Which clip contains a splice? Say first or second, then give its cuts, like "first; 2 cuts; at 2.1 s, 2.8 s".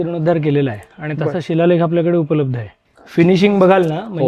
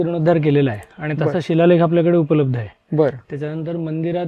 first; 1 cut; at 2.8 s